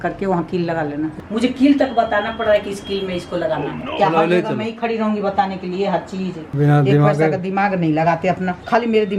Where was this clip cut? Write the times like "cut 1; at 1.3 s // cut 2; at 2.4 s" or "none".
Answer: cut 1; at 1.2 s // cut 2; at 3.9 s // cut 3; at 6.5 s